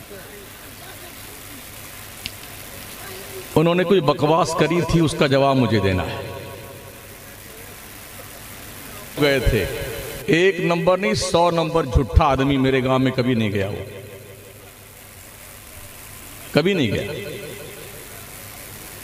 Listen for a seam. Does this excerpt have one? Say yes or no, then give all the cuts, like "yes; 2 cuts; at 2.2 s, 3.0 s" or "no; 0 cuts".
yes; 1 cut; at 9.2 s